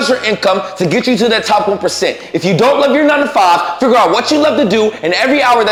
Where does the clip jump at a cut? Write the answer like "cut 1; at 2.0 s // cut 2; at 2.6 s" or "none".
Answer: none